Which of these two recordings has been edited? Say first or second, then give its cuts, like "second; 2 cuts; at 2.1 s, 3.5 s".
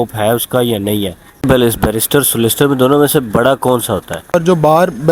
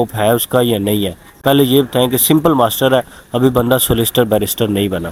first; 2 cuts; at 1.4 s, 4.3 s